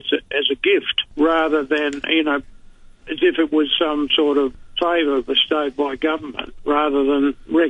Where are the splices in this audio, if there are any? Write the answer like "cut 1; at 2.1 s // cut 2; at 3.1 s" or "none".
cut 1; at 1.0 s // cut 2; at 4.5 s